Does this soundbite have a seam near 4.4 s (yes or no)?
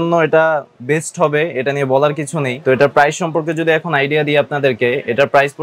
no